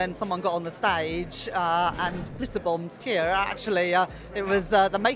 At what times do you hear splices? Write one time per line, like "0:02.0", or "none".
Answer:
none